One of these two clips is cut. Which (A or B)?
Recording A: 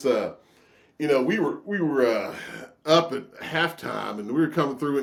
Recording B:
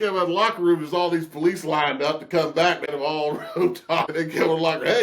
B